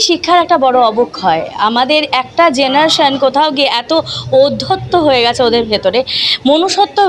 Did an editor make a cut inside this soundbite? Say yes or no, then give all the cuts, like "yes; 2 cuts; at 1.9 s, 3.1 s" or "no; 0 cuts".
no; 0 cuts